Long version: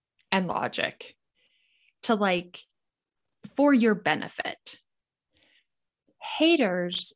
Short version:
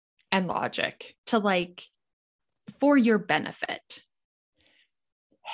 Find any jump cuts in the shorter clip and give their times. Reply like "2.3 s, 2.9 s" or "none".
1.1 s